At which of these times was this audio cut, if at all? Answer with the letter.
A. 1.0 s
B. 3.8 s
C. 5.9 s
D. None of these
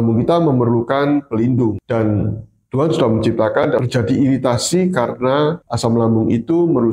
B